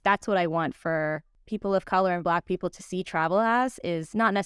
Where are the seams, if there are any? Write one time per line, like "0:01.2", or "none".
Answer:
0:01.3